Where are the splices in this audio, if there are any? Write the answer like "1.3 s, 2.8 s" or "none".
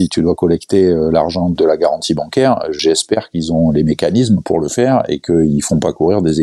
1.5 s, 2.8 s

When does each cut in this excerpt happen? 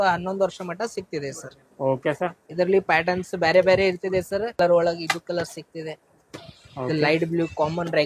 4.6 s

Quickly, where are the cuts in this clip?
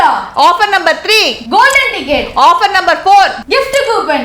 1.4 s, 3.4 s

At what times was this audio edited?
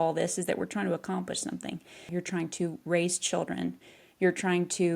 2.1 s

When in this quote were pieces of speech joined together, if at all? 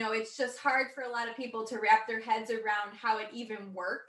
none

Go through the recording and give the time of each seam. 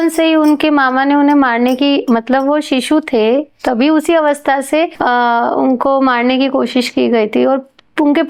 none

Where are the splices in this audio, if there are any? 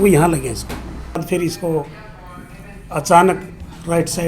1.2 s

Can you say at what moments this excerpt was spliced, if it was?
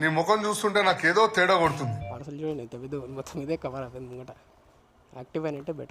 2.1 s

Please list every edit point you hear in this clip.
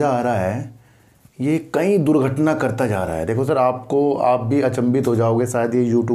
none

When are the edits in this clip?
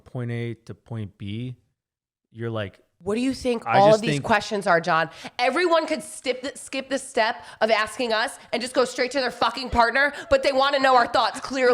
2.9 s

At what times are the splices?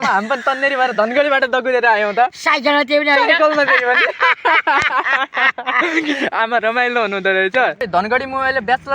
7.8 s

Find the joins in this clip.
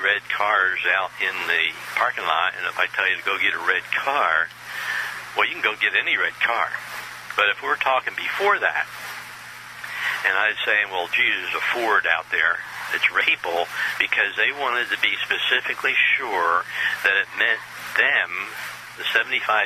none

